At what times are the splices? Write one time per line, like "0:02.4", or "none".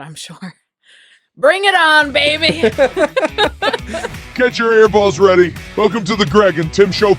0:04.0